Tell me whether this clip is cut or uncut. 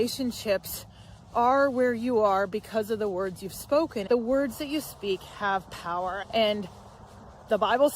cut